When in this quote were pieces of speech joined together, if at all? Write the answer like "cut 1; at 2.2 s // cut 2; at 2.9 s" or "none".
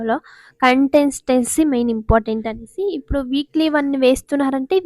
none